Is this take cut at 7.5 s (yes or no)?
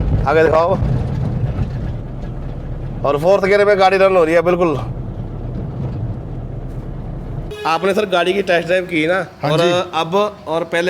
yes